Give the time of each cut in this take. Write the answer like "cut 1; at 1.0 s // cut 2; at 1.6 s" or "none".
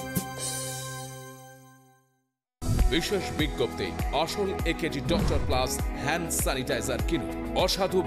cut 1; at 2.4 s